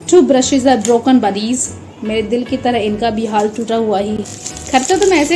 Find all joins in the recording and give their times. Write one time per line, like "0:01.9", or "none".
0:04.2